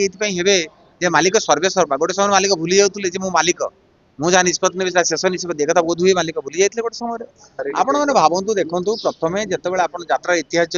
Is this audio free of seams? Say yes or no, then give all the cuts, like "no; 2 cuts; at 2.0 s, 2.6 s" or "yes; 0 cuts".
no; 1 cut; at 7.6 s